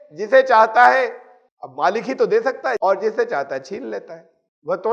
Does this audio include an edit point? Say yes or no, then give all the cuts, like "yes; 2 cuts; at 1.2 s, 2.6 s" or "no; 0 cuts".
yes; 1 cut; at 2.8 s